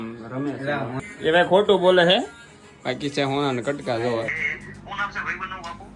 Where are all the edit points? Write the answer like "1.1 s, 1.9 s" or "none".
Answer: 1.0 s, 4.4 s